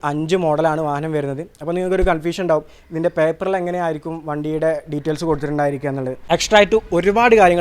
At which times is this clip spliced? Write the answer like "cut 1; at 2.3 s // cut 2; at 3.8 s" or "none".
cut 1; at 6.1 s